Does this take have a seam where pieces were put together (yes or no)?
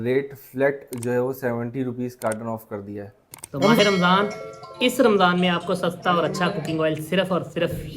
yes